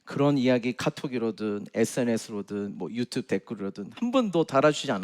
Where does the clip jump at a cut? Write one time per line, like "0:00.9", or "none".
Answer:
0:03.9

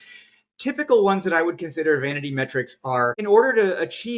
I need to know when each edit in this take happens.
0:03.2

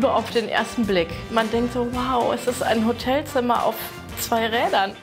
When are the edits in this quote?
0:01.2

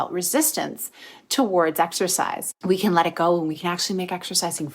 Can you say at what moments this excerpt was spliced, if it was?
0:02.5
0:03.6

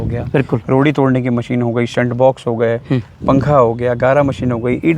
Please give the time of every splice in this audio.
0:03.1

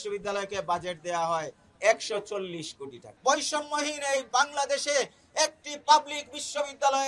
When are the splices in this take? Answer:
0:03.0

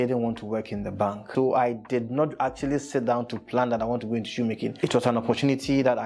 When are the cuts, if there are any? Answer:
0:01.3
0:04.7

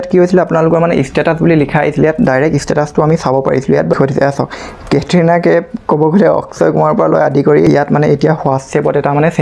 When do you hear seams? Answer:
0:03.9
0:07.7

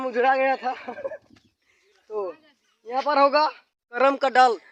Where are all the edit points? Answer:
none

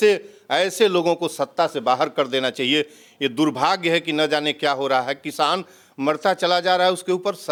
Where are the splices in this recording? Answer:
none

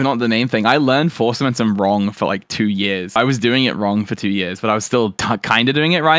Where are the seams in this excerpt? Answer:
none

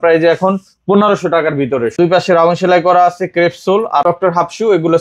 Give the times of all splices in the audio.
0:02.0
0:04.0

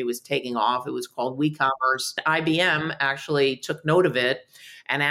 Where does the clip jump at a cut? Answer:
0:02.2

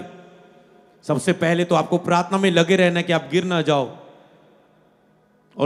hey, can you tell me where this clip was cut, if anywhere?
none

